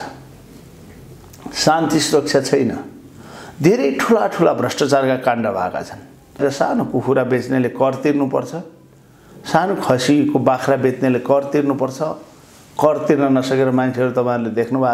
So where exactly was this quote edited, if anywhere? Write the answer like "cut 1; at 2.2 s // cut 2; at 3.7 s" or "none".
cut 1; at 6.4 s